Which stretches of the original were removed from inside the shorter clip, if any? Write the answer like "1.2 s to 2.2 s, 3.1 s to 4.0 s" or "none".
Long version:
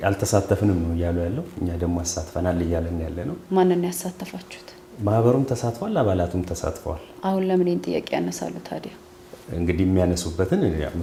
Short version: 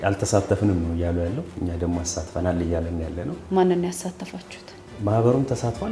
none